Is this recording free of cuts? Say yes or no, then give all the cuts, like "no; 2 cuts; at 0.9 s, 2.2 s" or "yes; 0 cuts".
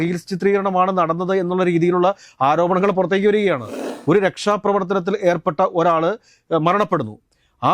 no; 1 cut; at 3.7 s